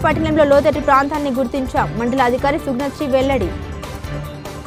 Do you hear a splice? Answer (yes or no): no